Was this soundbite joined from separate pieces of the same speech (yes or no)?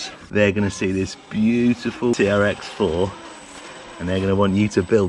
yes